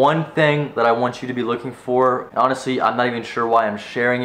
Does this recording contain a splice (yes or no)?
yes